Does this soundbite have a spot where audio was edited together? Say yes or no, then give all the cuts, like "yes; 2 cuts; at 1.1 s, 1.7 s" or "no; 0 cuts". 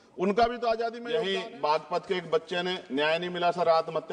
yes; 1 cut; at 1.0 s